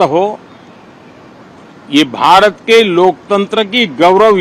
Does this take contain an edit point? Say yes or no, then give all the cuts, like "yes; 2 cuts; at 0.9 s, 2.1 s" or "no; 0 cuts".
no; 0 cuts